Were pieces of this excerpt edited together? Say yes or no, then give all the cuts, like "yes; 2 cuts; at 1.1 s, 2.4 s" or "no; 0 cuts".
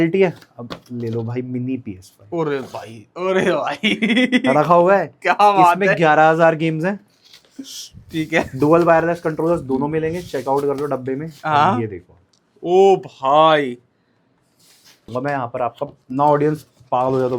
yes; 1 cut; at 15.1 s